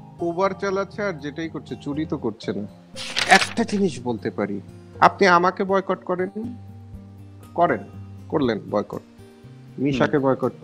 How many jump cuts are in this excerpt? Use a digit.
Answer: 1